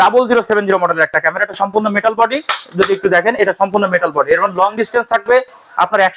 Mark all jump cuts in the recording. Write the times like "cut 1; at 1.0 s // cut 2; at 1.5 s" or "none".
none